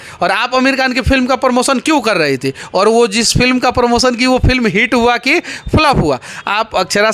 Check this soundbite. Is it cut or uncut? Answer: uncut